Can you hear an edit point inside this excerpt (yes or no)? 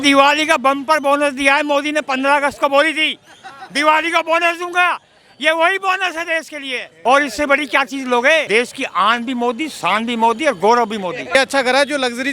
yes